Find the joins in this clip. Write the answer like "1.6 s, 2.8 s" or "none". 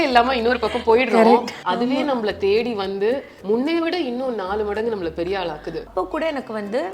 1.6 s, 3.3 s, 5.9 s